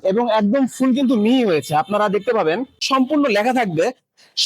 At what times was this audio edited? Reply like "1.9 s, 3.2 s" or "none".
2.8 s